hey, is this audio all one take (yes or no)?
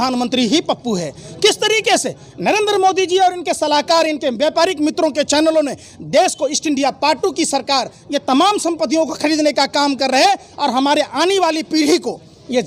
yes